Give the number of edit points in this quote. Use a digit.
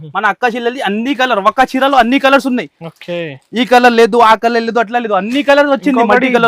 0